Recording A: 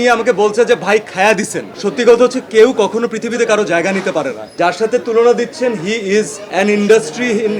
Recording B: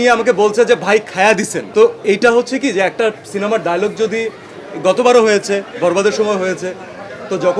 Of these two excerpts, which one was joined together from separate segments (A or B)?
A